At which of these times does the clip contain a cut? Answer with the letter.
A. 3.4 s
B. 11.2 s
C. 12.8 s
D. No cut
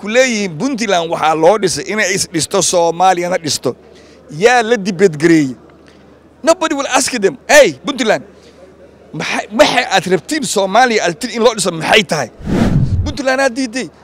C